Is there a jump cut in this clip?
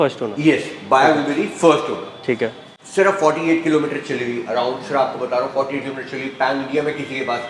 no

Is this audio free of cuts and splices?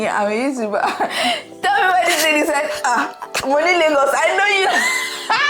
yes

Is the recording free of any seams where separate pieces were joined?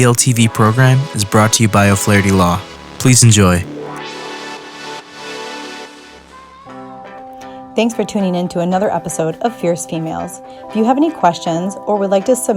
no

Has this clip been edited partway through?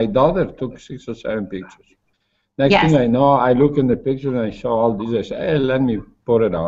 no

